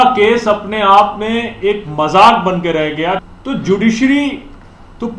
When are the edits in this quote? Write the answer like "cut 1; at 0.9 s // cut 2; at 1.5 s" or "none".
cut 1; at 3.3 s

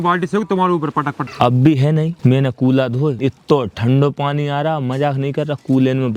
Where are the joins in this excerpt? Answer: cut 1; at 1.2 s // cut 2; at 2.1 s // cut 3; at 3.2 s

